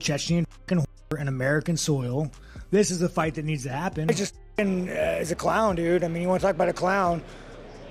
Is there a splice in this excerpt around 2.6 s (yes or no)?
no